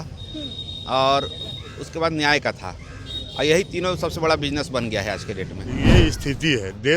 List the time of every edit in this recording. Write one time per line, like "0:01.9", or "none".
0:05.9